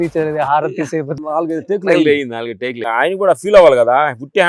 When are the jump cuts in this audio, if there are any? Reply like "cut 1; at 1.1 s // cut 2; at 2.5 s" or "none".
cut 1; at 1.1 s // cut 2; at 2.8 s